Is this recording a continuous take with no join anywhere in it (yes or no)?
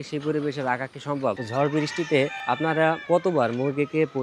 no